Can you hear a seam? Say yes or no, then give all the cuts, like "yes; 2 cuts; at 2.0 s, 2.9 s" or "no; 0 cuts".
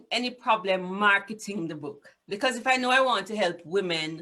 no; 0 cuts